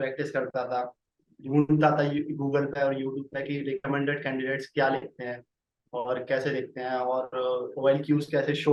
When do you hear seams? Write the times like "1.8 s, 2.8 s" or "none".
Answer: none